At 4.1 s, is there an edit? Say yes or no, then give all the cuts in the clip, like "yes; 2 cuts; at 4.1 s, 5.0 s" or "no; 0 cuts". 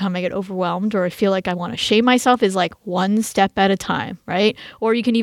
no; 0 cuts